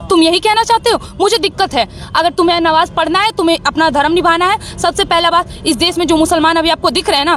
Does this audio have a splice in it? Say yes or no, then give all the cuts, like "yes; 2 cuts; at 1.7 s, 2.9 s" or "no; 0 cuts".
no; 0 cuts